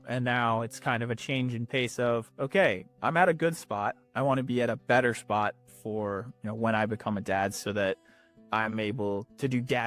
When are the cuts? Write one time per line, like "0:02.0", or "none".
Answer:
none

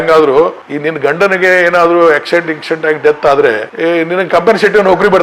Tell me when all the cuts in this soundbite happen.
none

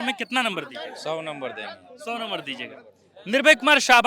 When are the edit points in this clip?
none

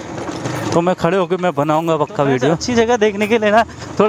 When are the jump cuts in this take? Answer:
0:02.6

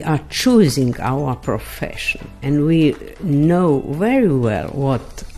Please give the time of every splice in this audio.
none

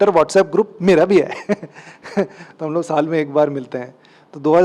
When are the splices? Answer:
none

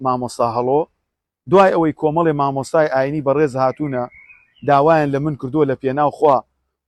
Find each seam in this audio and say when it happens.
none

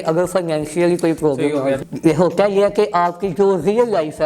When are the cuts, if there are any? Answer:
0:01.8

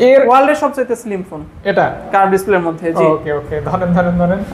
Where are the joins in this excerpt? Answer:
none

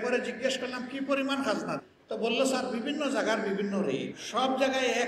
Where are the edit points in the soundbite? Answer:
0:01.8
0:04.2

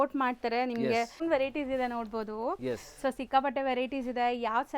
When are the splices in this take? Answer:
0:01.2

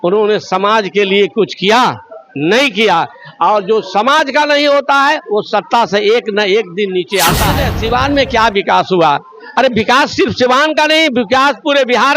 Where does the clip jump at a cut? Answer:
0:07.5

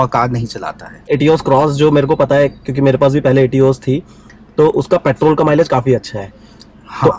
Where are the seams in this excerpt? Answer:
0:01.1

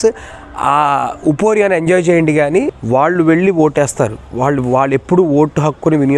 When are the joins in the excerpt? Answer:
0:02.8

